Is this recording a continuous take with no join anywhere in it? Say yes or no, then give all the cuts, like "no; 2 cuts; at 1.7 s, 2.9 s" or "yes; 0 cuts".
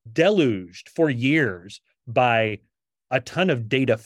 yes; 0 cuts